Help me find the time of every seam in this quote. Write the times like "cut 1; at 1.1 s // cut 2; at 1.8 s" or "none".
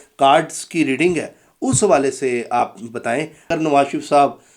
cut 1; at 3.5 s